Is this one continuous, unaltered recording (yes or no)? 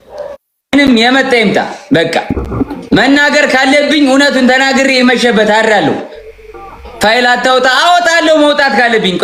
yes